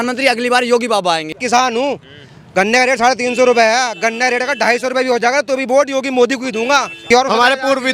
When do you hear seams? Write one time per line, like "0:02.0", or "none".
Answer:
0:01.4
0:07.0